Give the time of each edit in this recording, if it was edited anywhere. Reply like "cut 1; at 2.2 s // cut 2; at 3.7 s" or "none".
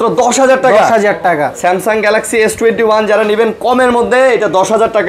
none